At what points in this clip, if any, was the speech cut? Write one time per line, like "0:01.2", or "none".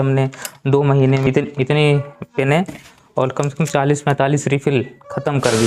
0:01.3